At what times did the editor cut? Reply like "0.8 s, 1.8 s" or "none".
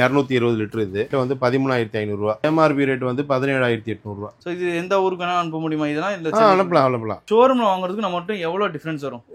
1.1 s, 2.4 s, 7.2 s